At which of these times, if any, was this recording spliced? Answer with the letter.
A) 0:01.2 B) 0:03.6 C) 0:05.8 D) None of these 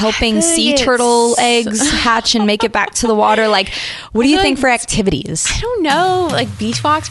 D